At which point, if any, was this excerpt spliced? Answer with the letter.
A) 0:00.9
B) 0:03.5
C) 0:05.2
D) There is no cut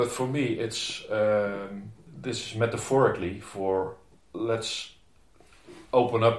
D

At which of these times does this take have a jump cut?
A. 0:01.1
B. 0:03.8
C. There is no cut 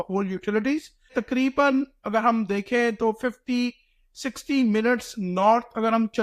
A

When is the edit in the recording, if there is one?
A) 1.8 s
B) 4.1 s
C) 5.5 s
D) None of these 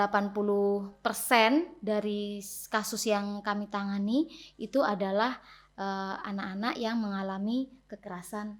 D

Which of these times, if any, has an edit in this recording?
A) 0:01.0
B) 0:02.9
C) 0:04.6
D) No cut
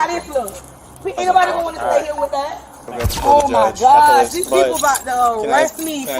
B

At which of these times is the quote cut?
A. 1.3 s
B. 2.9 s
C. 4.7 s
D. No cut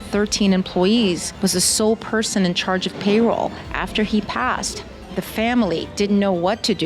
A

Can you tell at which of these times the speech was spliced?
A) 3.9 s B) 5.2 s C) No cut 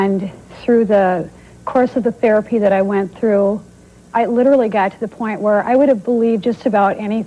A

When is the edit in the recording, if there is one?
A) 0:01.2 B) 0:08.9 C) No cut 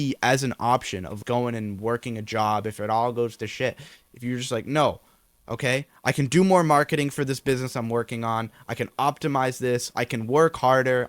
A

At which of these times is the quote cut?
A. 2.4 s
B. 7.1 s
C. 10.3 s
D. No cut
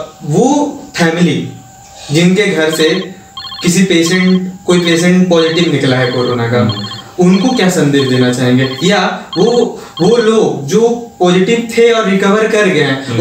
D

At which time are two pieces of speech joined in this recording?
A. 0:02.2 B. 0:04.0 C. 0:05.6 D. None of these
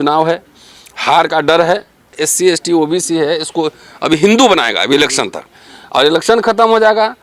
A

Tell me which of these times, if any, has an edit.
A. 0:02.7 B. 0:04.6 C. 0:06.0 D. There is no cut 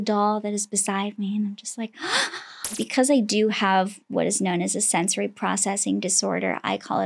A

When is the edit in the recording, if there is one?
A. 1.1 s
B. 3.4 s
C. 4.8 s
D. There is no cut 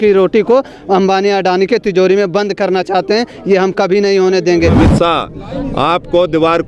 C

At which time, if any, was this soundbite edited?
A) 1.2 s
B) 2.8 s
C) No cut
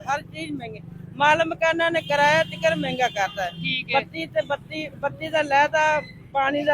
C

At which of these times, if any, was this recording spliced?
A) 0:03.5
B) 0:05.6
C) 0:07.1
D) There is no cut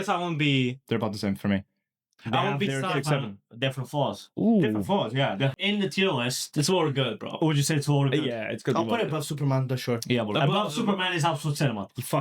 B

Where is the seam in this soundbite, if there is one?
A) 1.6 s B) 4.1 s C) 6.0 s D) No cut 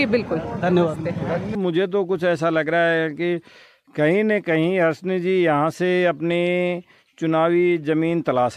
A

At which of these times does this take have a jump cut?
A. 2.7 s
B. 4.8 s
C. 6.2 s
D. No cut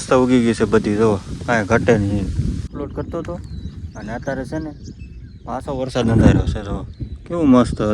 A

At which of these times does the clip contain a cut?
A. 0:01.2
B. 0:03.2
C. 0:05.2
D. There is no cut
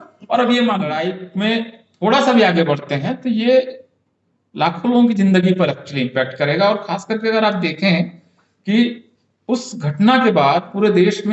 A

